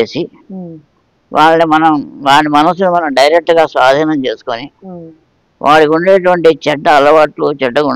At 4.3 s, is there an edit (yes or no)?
no